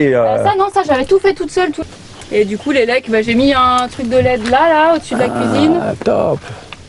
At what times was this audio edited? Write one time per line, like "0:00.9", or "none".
0:01.7